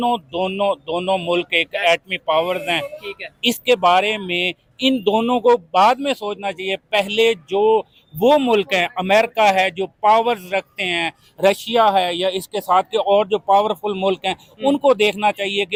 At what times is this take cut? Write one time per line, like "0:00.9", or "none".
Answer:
none